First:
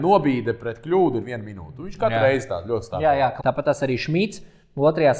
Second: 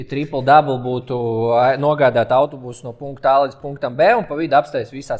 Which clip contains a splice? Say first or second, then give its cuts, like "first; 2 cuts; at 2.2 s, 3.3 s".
first; 1 cut; at 3.3 s